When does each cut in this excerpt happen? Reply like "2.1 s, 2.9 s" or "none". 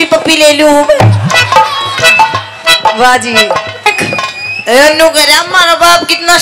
3.9 s